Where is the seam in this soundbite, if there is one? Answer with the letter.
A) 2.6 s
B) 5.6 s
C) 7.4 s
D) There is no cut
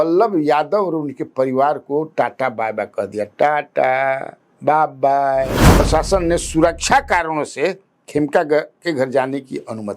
B